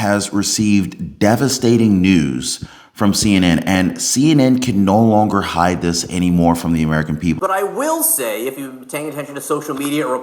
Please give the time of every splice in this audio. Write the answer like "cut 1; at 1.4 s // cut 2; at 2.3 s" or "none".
cut 1; at 7.4 s